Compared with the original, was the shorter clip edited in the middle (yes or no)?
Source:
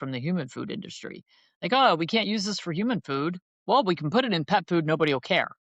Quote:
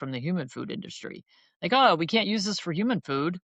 no